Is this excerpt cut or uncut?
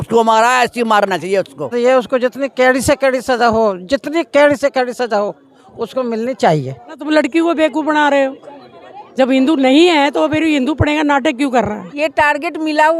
cut